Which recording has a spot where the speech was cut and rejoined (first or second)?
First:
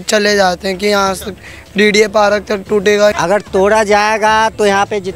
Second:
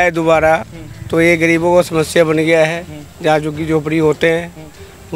first